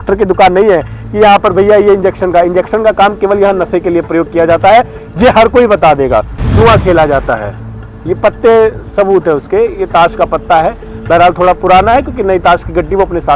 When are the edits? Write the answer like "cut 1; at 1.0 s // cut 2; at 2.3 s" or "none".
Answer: cut 1; at 6.4 s